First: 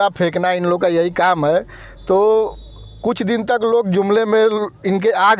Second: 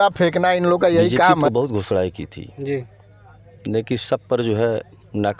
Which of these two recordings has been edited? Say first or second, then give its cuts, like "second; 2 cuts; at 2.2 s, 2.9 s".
second; 1 cut; at 1.5 s